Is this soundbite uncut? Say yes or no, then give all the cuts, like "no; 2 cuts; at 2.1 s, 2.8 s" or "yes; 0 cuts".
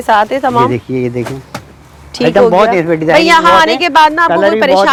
yes; 0 cuts